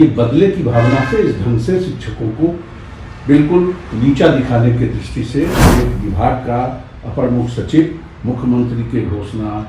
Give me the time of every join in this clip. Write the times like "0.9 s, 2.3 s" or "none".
5.6 s